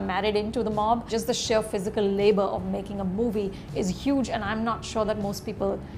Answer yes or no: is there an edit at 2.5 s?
no